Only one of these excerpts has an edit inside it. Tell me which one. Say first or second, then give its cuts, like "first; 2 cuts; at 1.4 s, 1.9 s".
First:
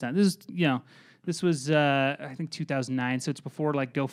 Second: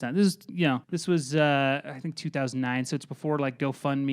second; 1 cut; at 0.9 s